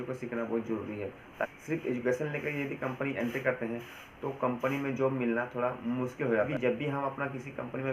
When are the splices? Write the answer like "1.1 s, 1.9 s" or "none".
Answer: 1.5 s, 6.5 s